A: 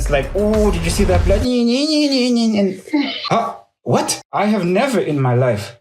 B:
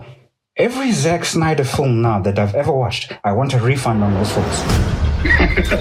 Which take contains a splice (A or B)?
A